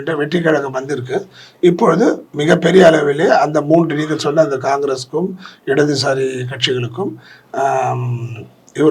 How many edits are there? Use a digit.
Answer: 0